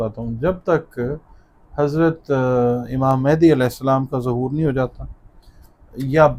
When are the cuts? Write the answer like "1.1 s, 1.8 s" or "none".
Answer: none

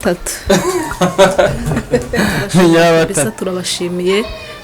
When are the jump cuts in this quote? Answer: 3.3 s

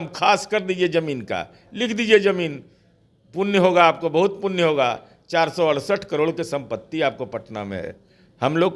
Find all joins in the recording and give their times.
none

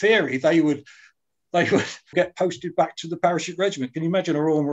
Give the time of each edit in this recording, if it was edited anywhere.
2.1 s

